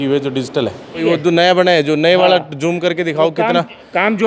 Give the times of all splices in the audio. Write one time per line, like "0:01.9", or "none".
0:01.0